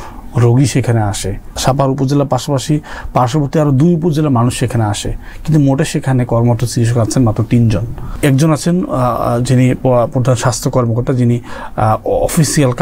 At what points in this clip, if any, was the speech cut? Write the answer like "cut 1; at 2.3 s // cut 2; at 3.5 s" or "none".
cut 1; at 1.5 s // cut 2; at 8.1 s